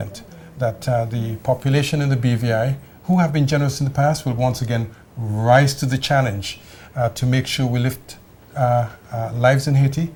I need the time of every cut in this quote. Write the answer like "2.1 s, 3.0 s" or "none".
none